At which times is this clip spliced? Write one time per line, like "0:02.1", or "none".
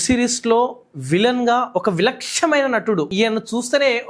0:03.1